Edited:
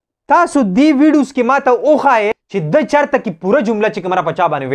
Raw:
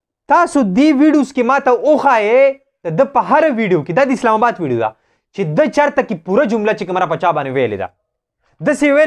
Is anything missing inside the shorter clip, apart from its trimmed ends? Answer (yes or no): yes